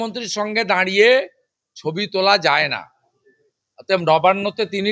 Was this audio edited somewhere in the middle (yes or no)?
no